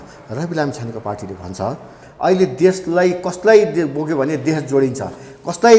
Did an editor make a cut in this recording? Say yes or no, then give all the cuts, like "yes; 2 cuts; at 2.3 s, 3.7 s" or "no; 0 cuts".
yes; 1 cut; at 2.0 s